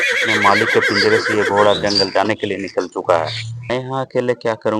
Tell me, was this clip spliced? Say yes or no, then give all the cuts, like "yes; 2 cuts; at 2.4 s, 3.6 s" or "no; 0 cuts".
yes; 1 cut; at 3.7 s